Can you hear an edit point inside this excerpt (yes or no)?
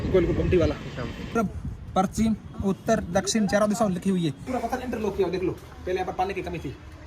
yes